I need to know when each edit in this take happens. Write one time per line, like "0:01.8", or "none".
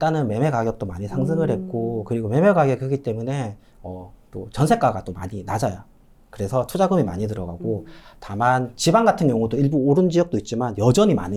none